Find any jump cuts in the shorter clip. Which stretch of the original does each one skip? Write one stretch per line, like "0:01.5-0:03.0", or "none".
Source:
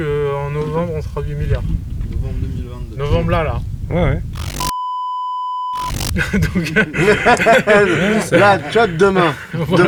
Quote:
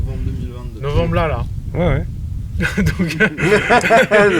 0:04.5-0:05.9

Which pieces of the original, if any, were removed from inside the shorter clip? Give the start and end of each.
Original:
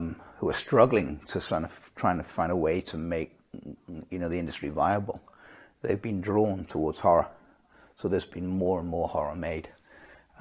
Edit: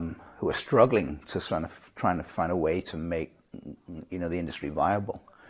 none

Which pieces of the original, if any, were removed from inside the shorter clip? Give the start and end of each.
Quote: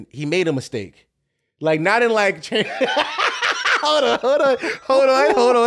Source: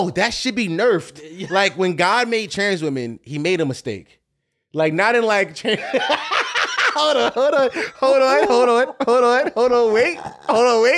none

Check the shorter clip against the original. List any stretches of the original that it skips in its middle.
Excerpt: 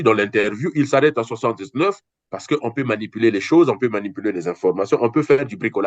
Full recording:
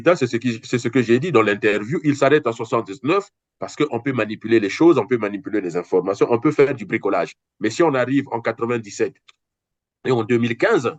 none

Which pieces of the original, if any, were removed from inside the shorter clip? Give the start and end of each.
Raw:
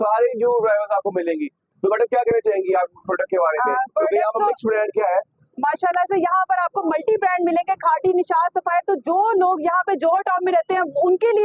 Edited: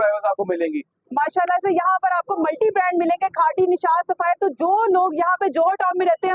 0:01.6-0:05.4

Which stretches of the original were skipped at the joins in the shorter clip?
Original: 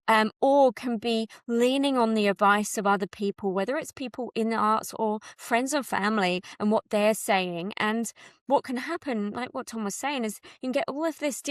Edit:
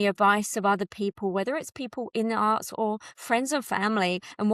none

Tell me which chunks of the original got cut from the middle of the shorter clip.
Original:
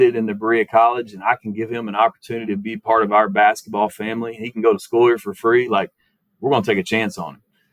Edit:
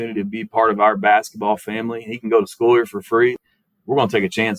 0:05.7-0:05.9

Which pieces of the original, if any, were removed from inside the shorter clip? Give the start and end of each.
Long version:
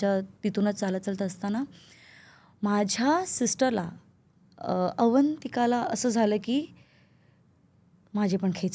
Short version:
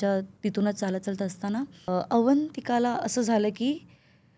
0:01.9-0:04.8

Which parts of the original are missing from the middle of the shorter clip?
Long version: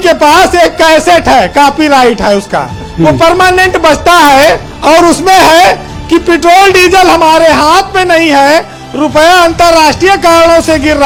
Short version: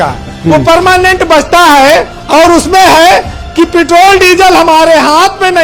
none

